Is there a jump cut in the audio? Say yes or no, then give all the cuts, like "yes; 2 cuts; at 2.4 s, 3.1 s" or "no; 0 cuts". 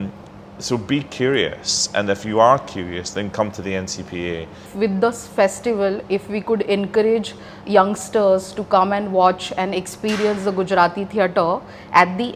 yes; 1 cut; at 4.7 s